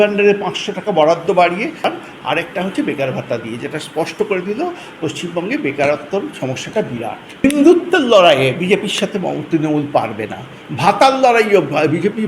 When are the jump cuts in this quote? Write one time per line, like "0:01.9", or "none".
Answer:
0:01.8
0:07.4